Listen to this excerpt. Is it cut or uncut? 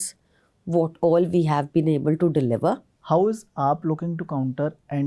cut